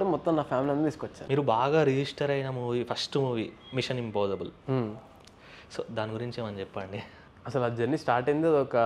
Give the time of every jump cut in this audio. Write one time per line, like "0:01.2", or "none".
0:01.1